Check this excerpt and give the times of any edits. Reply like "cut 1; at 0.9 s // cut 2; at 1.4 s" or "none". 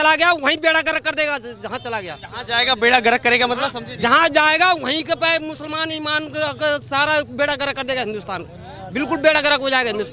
none